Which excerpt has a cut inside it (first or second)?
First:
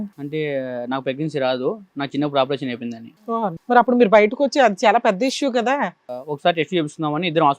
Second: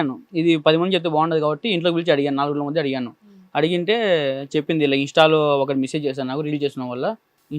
first